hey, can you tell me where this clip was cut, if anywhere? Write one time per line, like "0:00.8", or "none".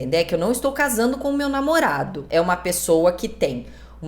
0:02.2